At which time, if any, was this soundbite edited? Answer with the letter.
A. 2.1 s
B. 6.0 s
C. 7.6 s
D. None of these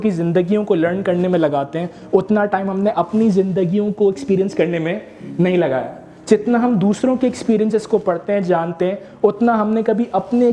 D